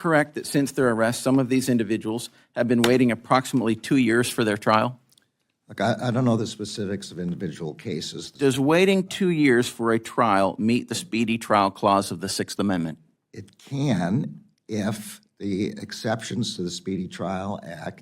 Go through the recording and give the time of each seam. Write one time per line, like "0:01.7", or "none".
0:08.2